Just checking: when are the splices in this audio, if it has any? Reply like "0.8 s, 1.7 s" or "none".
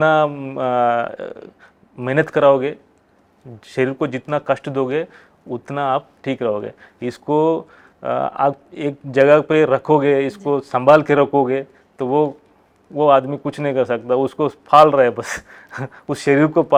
none